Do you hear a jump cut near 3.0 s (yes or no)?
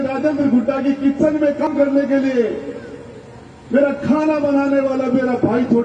no